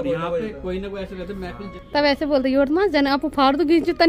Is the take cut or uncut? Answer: cut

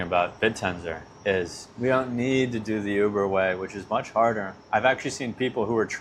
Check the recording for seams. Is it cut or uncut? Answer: uncut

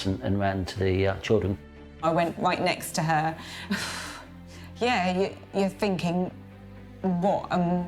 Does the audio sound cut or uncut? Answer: cut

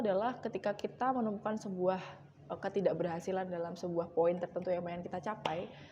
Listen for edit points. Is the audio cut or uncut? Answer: uncut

